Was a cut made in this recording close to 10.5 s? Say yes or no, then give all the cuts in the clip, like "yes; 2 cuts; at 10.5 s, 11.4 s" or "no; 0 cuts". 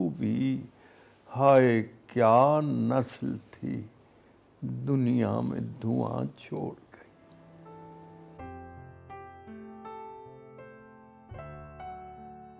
no; 1 cut; at 7.2 s